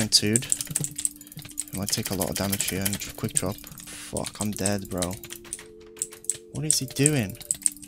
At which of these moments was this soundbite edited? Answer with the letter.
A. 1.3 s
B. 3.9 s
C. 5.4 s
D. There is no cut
B